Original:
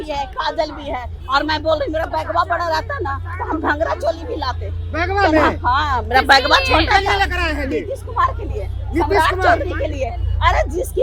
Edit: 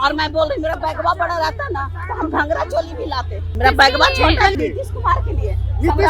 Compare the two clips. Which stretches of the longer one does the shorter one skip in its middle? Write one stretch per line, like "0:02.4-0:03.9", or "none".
0:04.8-0:06.0
0:07.0-0:07.7